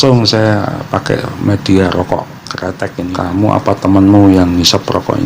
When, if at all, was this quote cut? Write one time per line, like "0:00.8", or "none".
0:03.1